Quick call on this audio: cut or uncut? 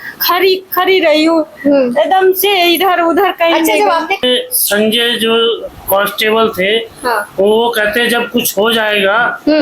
cut